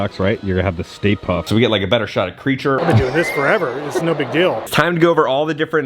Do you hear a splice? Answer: yes; 3 cuts; at 1.4 s, 2.8 s, 4.7 s

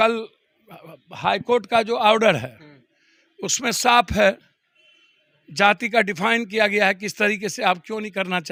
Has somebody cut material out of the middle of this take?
no; 0 cuts

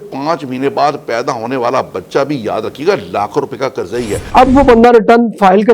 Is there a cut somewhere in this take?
yes; 1 cut; at 4.2 s

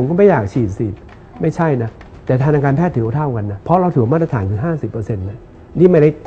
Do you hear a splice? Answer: no; 0 cuts

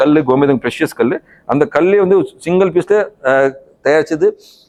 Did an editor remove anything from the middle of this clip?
no; 0 cuts

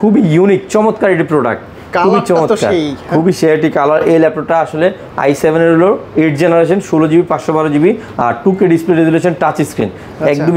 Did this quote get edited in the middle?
no; 0 cuts

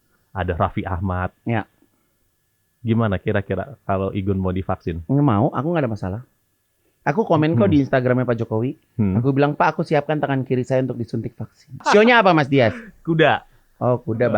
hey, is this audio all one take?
no; 1 cut; at 11.8 s

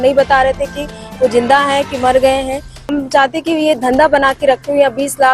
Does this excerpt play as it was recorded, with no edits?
no; 1 cut; at 2.9 s

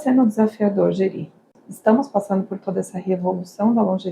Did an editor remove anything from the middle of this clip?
yes; 1 cut; at 1.5 s

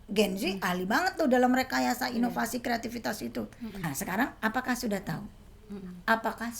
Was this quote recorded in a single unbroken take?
no; 1 cut; at 3.9 s

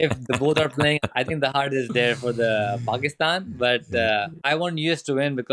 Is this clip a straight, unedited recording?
no; 2 cuts; at 1.0 s, 4.3 s

